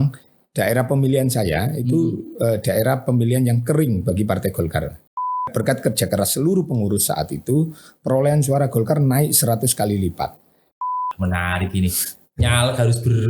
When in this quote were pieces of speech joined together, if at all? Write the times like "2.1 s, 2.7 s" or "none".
5.5 s, 10.7 s